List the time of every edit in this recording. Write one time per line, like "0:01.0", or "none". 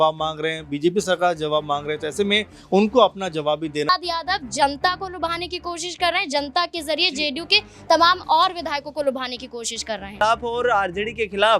0:03.9
0:10.2